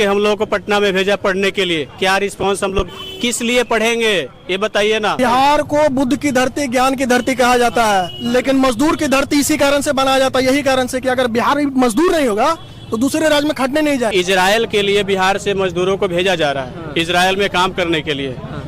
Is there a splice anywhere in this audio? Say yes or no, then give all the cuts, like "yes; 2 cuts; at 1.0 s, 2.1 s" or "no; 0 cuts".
yes; 2 cuts; at 5.2 s, 14.1 s